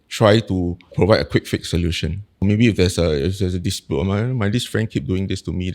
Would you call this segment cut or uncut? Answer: cut